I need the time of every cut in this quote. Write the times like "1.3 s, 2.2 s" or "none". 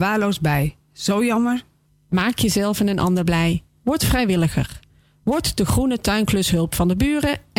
none